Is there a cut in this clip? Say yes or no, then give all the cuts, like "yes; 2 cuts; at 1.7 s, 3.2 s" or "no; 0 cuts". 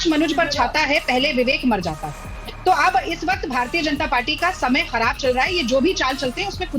no; 0 cuts